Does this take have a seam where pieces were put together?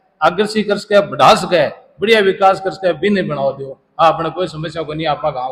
no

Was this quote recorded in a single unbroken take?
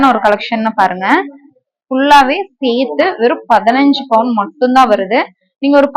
yes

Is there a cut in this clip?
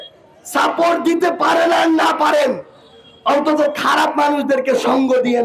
no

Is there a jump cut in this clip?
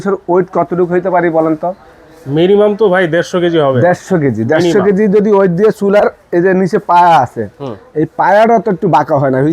no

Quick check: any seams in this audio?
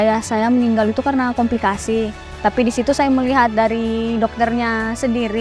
no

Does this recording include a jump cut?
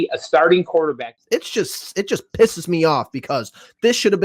yes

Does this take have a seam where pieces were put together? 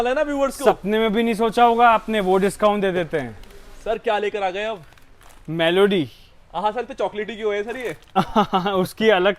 yes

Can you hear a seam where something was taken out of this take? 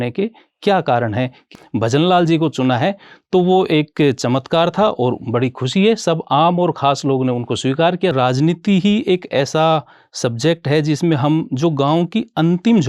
yes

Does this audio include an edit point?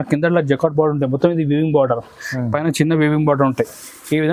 no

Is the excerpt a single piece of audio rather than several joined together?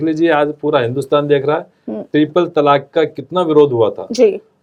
yes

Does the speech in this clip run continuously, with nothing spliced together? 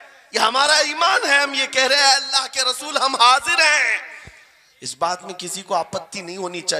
yes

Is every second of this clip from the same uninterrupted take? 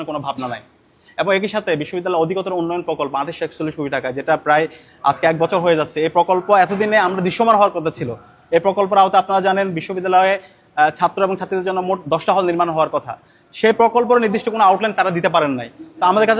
yes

